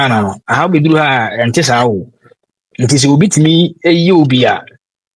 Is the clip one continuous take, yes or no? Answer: yes